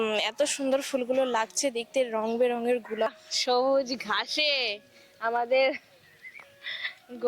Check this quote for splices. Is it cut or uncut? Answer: cut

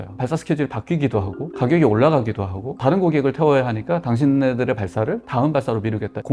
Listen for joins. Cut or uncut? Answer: uncut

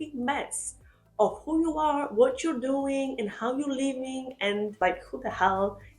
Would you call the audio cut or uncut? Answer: cut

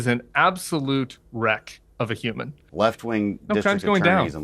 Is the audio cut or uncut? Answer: cut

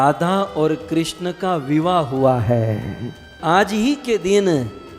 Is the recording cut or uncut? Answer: cut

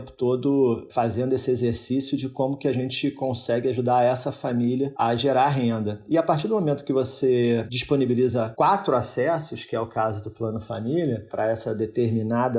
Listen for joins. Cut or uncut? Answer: uncut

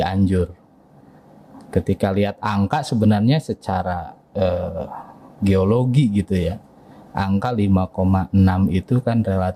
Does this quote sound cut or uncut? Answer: uncut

